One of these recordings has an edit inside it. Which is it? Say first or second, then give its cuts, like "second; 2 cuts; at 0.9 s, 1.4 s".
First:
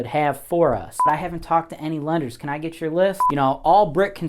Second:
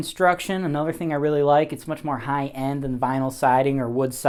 first; 2 cuts; at 1.0 s, 3.2 s